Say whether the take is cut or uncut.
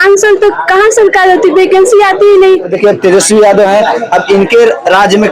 cut